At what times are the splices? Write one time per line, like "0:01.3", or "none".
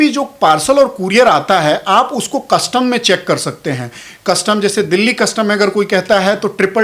none